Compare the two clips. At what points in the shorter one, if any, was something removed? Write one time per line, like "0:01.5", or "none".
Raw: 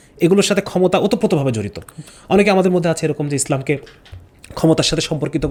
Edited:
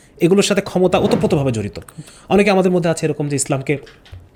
none